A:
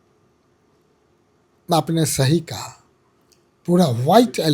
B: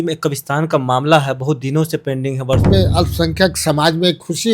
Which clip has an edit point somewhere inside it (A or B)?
B